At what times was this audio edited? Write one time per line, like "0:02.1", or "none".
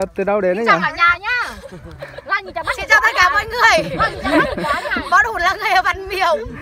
none